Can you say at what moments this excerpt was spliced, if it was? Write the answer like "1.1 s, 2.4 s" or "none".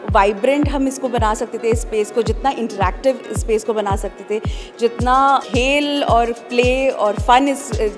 5.4 s